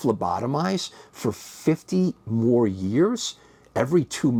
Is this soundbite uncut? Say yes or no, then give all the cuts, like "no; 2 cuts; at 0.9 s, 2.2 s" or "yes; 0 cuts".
yes; 0 cuts